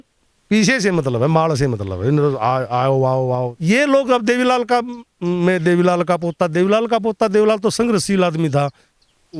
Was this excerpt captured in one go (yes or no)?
no